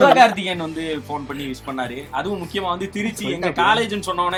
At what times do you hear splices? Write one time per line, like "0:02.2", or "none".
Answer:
none

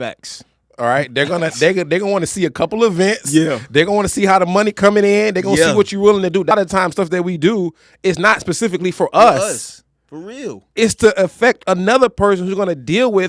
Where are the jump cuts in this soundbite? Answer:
0:06.5

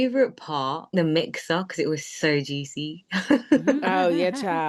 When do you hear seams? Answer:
0:00.9

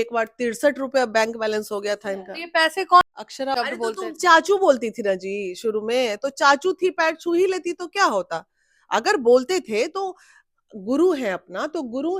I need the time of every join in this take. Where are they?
0:03.2

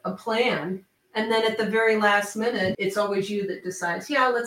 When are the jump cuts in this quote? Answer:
0:01.1
0:02.8

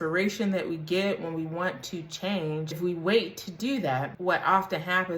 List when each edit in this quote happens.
0:02.8
0:04.1

